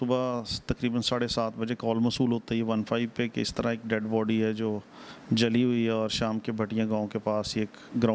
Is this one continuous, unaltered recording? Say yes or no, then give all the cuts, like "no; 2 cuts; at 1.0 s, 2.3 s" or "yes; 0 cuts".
yes; 0 cuts